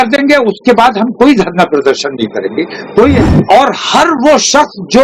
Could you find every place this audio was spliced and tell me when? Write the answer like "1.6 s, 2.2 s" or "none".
3.2 s